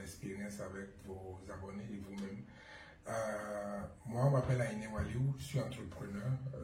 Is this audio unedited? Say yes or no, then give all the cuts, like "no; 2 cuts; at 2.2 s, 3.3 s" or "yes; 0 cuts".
yes; 0 cuts